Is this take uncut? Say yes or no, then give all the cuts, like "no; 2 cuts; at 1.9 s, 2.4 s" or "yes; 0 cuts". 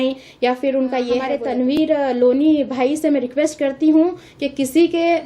no; 1 cut; at 1.5 s